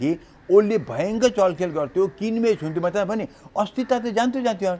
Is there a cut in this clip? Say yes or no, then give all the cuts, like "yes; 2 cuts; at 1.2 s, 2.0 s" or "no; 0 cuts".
no; 0 cuts